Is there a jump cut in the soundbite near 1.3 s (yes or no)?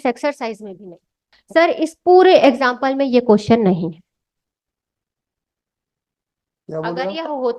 yes